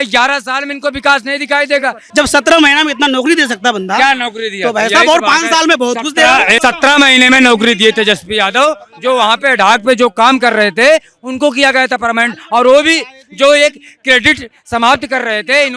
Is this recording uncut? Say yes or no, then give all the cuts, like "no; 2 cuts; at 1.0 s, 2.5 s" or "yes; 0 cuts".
no; 2 cuts; at 2.0 s, 6.5 s